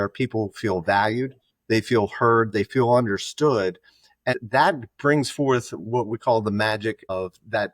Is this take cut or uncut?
cut